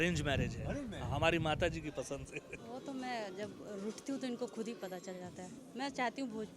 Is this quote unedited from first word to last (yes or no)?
no